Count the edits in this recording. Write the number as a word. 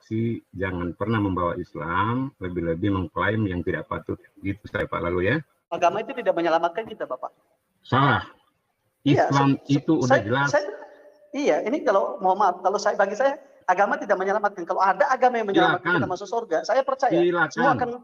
one